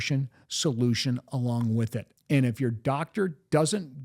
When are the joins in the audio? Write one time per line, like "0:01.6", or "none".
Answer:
0:02.1